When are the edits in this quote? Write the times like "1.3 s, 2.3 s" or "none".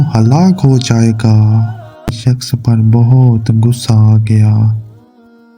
2.2 s